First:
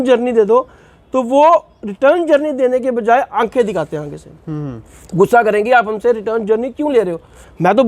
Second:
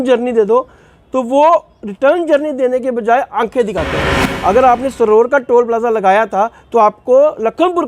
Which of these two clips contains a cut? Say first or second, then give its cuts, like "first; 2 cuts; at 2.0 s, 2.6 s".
second; 1 cut; at 4.3 s